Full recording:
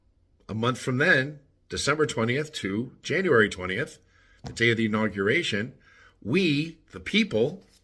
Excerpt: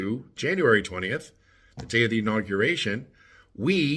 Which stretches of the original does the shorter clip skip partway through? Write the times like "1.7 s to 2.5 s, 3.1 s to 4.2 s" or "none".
none